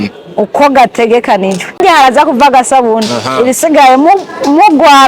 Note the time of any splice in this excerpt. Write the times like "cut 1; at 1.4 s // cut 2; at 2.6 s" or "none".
cut 1; at 1.8 s